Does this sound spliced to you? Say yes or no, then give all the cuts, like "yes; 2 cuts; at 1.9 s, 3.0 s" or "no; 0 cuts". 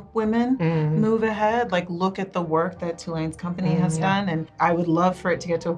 yes; 1 cut; at 4.5 s